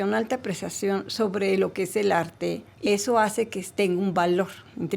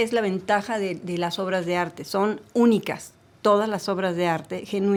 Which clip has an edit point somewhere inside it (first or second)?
first